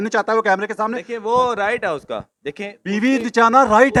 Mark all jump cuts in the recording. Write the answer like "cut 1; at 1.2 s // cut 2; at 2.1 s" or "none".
none